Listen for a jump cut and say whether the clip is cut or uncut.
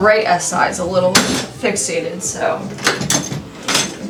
uncut